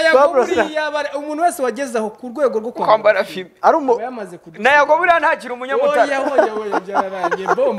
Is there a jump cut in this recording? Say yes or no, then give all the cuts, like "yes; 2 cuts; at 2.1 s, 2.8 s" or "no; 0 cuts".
no; 0 cuts